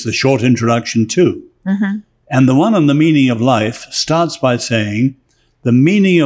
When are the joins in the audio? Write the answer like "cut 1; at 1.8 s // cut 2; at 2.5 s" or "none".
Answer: none

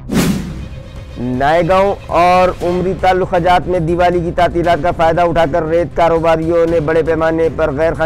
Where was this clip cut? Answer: none

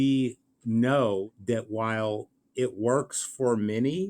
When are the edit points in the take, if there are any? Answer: cut 1; at 1.3 s

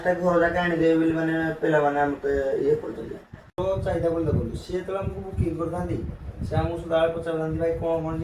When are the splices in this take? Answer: cut 1; at 3.6 s

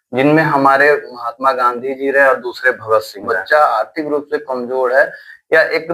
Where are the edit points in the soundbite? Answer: cut 1; at 3.3 s

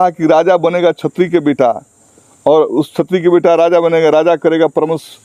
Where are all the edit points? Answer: none

